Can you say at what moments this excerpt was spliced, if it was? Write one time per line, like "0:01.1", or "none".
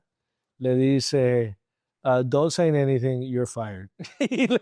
none